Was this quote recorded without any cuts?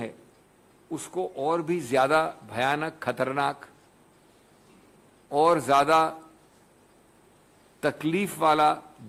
yes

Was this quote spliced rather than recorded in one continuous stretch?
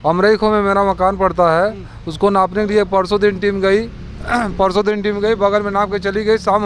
no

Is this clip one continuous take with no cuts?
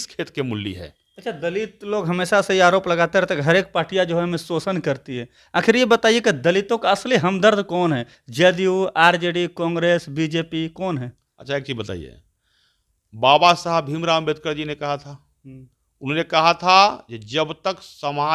yes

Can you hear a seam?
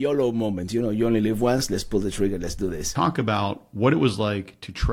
yes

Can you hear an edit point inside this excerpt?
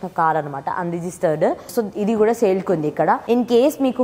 yes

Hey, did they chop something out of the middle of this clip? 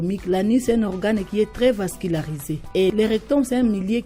yes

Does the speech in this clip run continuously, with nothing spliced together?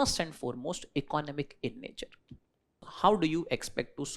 no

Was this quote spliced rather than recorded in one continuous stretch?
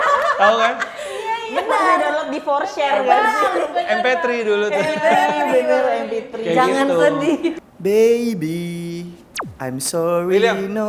yes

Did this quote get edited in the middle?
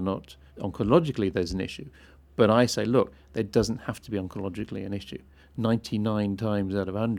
no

